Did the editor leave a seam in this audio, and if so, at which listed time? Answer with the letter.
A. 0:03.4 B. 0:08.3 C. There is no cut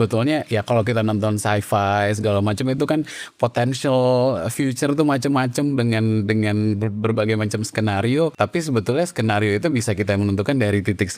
B